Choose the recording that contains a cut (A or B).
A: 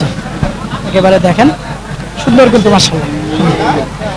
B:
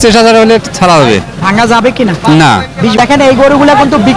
B